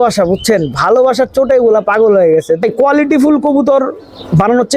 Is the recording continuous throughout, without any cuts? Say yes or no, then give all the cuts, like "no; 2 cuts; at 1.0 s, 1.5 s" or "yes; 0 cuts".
no; 1 cut; at 2.6 s